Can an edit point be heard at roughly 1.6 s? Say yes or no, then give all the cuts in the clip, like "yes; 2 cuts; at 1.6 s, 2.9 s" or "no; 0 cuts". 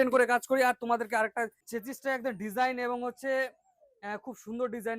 yes; 1 cut; at 1.6 s